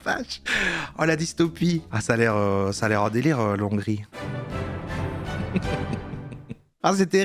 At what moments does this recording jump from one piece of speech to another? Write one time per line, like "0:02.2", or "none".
0:01.9
0:04.1